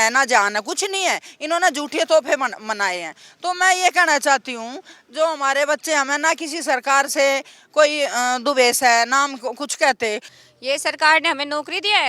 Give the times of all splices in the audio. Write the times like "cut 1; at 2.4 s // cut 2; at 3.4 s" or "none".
cut 1; at 10.3 s